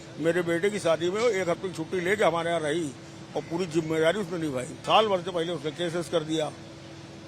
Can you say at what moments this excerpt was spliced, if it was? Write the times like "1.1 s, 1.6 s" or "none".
4.8 s